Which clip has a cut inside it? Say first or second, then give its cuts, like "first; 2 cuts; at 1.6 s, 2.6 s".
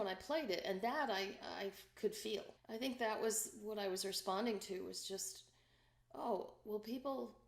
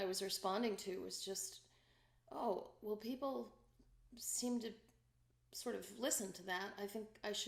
first; 1 cut; at 2.6 s